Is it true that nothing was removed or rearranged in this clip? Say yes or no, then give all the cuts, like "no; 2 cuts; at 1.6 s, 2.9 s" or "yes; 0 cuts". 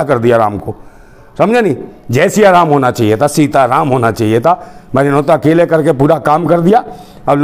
yes; 0 cuts